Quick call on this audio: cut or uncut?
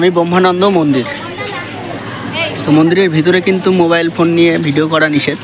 uncut